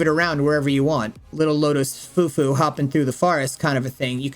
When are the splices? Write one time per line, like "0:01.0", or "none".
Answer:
0:01.3